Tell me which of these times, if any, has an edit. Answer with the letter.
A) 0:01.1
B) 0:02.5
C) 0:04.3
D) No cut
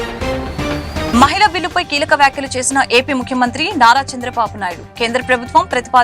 A